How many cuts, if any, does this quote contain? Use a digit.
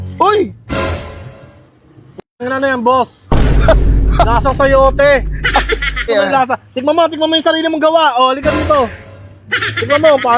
1